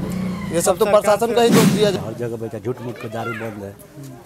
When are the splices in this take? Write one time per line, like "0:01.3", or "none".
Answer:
0:01.9